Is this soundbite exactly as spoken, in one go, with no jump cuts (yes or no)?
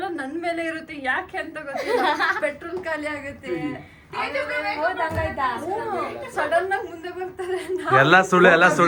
yes